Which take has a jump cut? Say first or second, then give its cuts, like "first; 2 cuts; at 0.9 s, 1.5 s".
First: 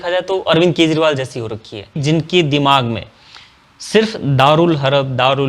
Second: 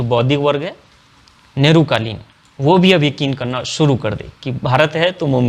first; 1 cut; at 2.0 s